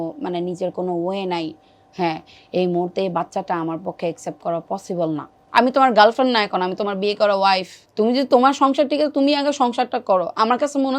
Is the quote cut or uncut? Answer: cut